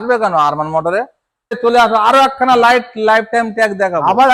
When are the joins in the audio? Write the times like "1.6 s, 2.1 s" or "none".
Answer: 1.6 s